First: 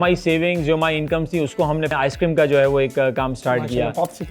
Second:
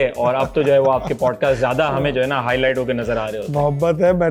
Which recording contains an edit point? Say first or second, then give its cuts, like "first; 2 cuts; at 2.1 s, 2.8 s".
first; 1 cut; at 1.9 s